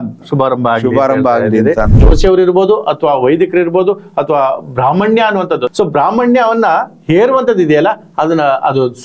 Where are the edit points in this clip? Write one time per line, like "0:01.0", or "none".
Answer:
0:02.0
0:05.7